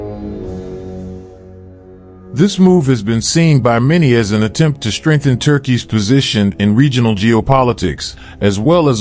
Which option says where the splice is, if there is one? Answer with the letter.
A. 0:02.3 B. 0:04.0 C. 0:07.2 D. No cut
A